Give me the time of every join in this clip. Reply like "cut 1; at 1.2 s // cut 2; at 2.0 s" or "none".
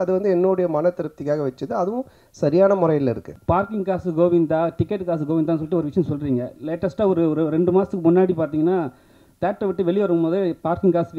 cut 1; at 3.4 s